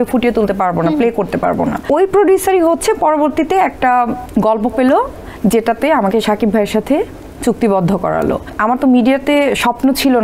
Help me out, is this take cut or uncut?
cut